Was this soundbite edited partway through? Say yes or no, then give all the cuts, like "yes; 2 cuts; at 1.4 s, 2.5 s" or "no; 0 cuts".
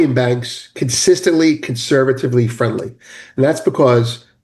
no; 0 cuts